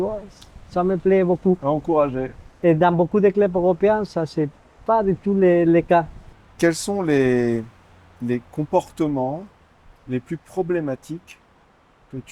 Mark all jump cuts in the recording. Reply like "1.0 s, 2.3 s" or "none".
6.2 s